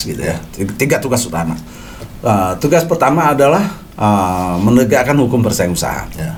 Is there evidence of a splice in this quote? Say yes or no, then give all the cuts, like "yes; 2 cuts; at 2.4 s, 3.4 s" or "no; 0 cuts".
no; 0 cuts